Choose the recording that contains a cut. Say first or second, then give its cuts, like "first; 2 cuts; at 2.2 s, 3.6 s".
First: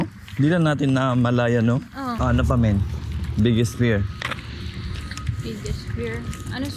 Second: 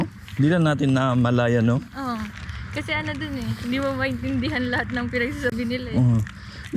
first; 1 cut; at 2.2 s